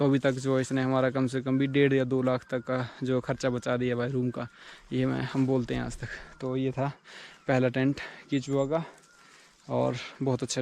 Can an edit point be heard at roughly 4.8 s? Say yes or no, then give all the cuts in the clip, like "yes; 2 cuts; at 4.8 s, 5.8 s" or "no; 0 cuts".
no; 0 cuts